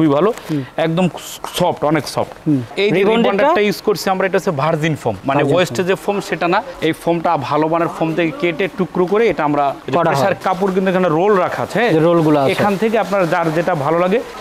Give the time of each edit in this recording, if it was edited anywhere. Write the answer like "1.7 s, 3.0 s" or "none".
2.7 s, 10.4 s